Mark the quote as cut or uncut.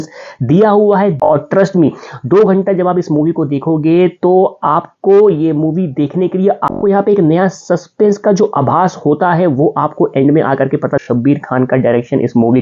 cut